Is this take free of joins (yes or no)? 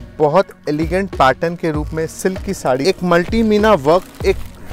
no